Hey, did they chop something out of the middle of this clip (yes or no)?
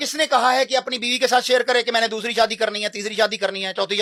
no